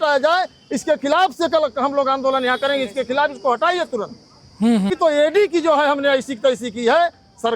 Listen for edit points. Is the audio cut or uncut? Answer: cut